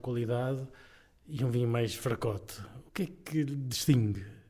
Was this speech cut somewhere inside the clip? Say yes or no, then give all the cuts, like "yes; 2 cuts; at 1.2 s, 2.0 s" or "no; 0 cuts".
no; 0 cuts